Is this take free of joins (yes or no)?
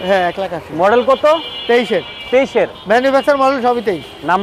yes